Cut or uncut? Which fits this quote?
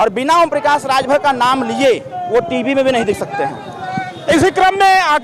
uncut